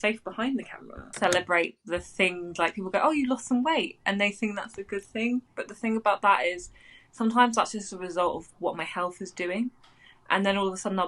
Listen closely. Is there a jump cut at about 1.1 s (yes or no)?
yes